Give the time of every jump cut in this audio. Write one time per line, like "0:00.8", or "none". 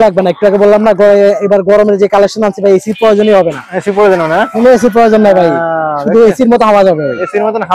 none